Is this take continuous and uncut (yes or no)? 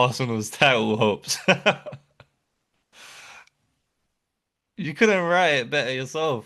yes